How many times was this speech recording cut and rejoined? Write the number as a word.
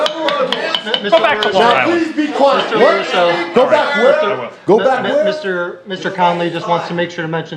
zero